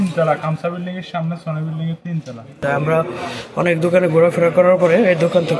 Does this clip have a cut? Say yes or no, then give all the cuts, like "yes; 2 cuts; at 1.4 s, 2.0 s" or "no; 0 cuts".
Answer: yes; 1 cut; at 2.6 s